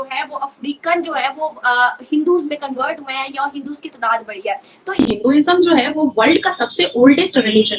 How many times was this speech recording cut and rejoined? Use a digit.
1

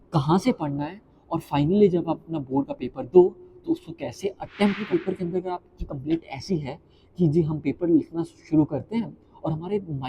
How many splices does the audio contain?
1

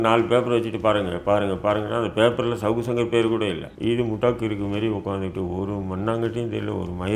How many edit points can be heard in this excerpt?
1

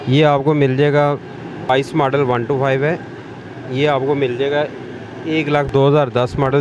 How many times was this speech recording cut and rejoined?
2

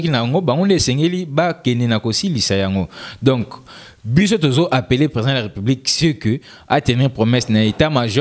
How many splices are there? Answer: 0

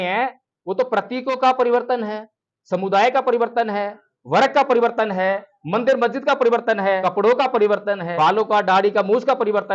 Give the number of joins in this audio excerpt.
2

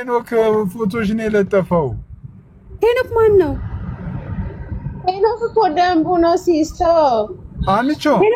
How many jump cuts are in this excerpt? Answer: 0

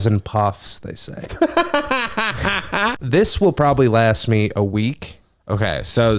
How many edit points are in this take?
1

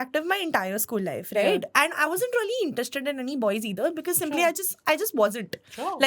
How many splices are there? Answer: 0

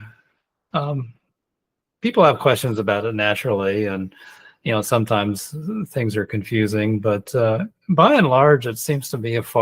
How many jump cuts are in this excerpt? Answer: 0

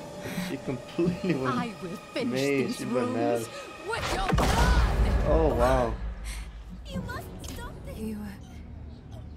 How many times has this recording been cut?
1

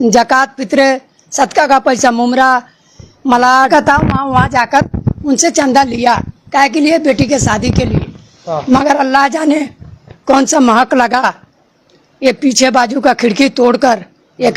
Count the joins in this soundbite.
1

